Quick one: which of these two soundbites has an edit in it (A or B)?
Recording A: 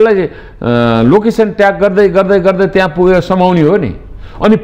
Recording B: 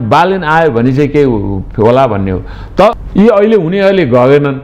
B